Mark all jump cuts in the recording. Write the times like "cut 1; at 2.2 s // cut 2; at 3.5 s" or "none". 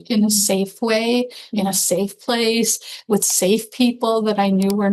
none